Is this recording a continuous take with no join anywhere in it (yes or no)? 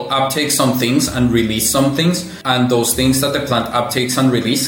no